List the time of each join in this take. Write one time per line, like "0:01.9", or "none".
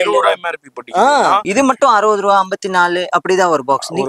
0:01.5